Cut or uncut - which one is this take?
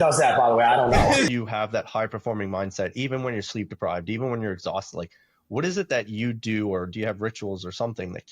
cut